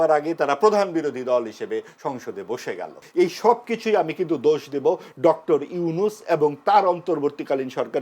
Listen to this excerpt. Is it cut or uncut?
cut